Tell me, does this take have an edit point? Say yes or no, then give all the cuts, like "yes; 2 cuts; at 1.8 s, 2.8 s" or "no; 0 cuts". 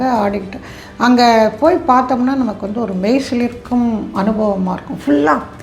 no; 0 cuts